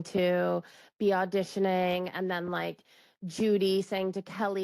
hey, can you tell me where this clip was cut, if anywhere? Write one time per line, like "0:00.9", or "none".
none